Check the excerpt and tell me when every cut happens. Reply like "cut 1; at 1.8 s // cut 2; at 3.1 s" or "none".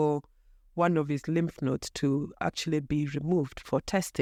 none